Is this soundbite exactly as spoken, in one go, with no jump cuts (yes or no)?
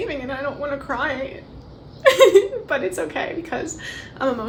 yes